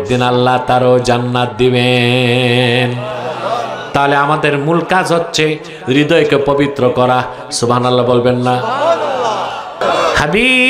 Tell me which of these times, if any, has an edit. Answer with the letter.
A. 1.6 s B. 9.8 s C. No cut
B